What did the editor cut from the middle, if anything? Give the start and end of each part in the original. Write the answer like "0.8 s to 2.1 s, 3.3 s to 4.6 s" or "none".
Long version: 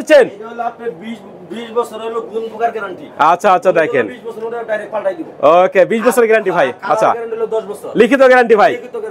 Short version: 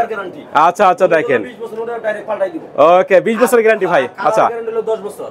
none